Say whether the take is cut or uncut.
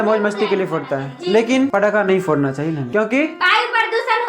cut